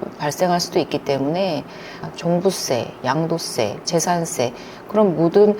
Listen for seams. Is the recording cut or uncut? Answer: cut